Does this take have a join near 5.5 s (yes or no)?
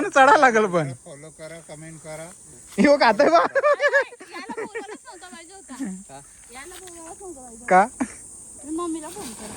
no